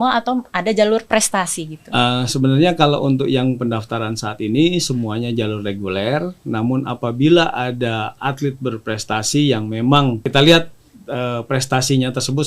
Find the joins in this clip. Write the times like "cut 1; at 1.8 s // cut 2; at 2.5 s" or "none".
cut 1; at 10.2 s